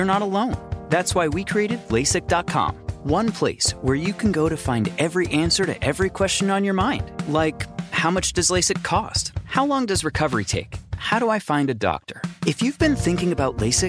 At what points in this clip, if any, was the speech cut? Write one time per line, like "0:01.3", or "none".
none